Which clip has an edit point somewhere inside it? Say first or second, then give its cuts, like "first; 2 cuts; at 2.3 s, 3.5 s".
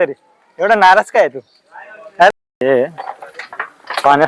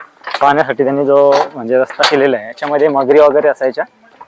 first; 1 cut; at 2.6 s